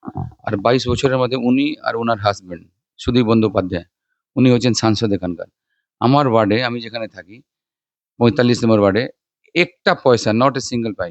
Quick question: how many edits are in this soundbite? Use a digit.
0